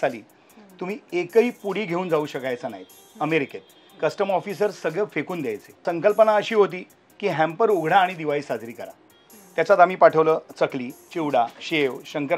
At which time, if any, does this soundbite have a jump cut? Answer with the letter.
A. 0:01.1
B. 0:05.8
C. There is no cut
B